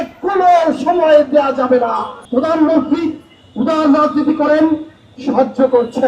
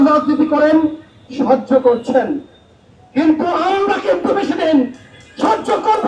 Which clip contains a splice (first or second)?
first